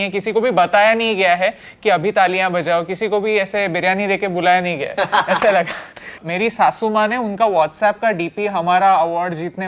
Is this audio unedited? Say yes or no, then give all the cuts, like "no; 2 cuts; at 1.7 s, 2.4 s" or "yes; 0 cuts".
no; 1 cut; at 6.2 s